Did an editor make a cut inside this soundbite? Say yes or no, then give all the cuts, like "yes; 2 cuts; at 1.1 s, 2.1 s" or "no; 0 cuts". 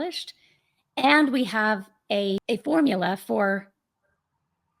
yes; 1 cut; at 2.4 s